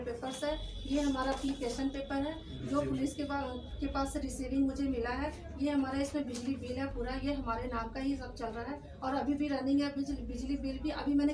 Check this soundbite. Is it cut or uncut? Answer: uncut